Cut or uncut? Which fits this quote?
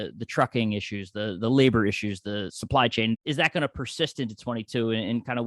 cut